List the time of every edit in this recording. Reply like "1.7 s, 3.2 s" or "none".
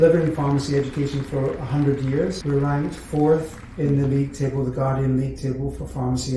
2.4 s